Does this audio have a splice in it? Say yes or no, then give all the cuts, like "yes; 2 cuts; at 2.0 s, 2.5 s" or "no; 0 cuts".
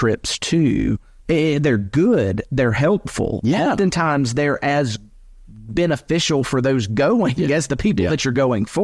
no; 0 cuts